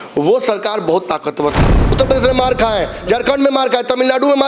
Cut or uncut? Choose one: cut